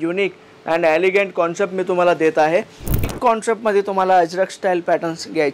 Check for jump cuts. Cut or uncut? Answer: cut